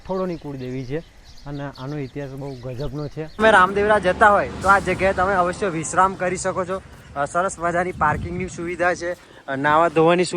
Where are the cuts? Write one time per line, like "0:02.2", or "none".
0:03.4